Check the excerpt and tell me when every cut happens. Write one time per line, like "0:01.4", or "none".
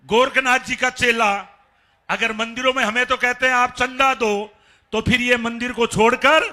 none